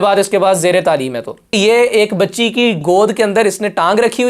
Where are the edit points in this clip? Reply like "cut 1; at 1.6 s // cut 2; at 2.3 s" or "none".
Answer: cut 1; at 1.5 s // cut 2; at 2.8 s